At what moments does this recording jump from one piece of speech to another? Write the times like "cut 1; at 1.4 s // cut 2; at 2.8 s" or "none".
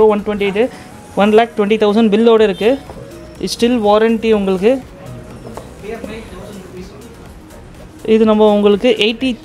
none